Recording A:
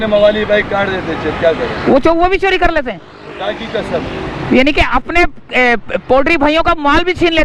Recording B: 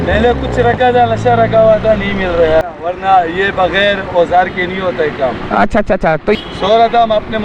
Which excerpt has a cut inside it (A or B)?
B